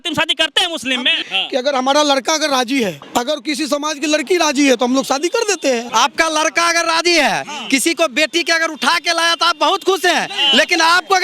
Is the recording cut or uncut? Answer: cut